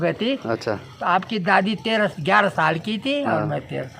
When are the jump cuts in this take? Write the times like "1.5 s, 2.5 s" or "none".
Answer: none